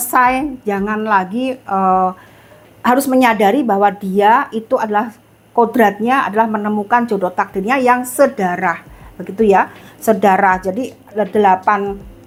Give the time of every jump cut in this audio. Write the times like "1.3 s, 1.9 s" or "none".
none